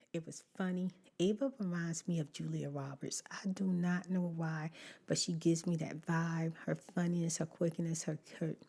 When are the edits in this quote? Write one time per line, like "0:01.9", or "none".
none

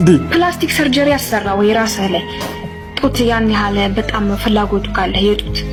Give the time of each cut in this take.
none

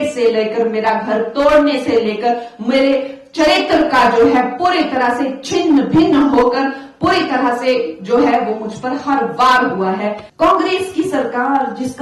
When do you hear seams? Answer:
0:10.2

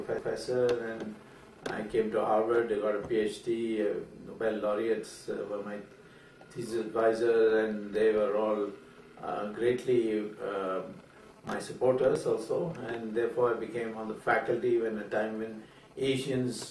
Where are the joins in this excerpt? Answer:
0:03.1

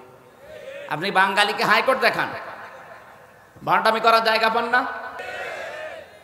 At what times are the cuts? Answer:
0:05.2

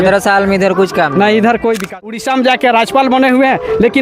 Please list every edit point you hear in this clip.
0:02.1

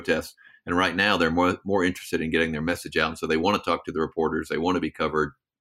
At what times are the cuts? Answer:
none

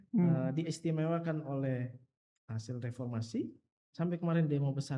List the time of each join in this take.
0:03.8

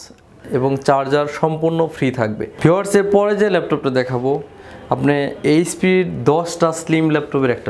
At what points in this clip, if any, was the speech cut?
0:02.5

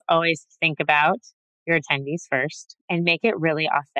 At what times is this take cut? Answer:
none

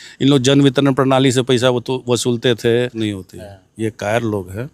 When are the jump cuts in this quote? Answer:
0:03.0

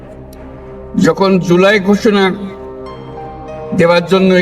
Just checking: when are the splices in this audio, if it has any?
0:00.9

